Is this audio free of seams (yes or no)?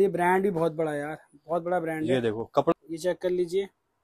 no